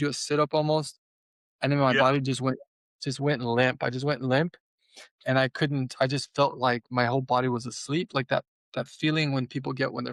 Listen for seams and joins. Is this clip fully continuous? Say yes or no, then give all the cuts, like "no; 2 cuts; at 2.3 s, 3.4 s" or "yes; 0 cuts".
yes; 0 cuts